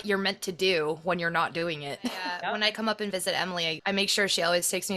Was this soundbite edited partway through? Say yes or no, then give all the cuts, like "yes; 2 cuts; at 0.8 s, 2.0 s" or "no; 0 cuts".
yes; 2 cuts; at 2.3 s, 3.8 s